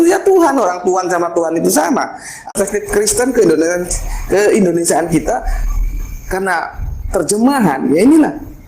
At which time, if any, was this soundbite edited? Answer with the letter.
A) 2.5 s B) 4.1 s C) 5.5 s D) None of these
A